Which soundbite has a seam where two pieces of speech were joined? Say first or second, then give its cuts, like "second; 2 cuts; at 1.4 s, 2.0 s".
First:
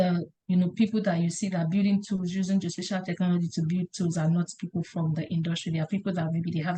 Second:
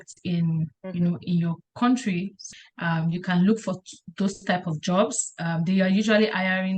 second; 1 cut; at 2.5 s